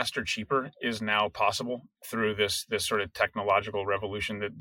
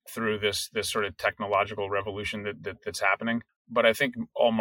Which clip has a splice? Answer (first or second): second